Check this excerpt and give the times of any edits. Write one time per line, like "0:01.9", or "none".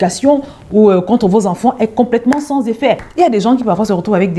0:03.1